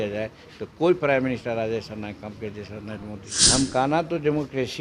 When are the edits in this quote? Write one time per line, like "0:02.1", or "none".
0:03.7